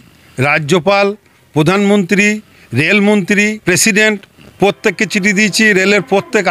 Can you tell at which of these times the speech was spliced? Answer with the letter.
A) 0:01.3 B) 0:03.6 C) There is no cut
B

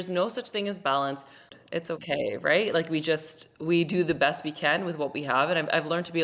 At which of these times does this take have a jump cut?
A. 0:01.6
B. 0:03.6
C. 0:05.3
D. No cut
A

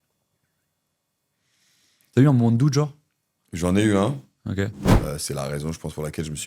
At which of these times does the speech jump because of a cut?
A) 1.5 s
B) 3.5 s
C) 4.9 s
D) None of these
C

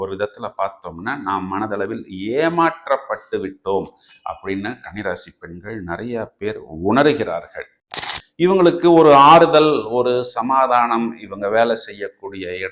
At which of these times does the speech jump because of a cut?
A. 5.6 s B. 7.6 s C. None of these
B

